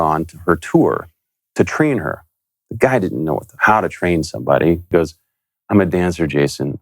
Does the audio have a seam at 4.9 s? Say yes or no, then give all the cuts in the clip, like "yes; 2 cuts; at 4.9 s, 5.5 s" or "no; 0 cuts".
yes; 2 cuts; at 3.5 s, 4.9 s